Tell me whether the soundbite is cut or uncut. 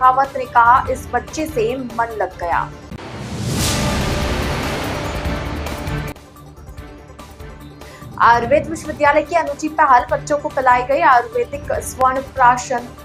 uncut